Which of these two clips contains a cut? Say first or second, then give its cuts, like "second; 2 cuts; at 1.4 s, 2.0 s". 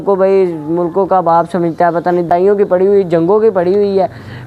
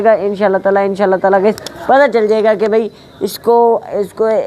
first; 1 cut; at 2.3 s